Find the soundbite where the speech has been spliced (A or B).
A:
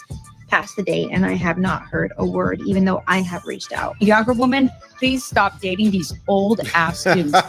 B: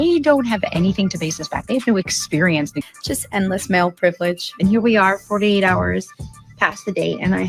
B